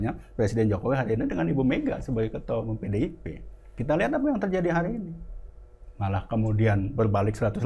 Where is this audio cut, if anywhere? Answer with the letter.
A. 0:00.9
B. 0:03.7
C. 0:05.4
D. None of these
B